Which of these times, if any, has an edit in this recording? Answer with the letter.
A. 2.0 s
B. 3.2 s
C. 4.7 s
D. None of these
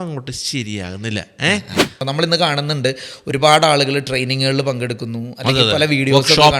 A